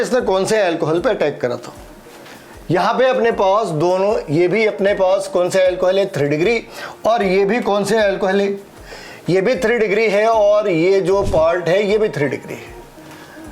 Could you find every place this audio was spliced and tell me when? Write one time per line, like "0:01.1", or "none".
none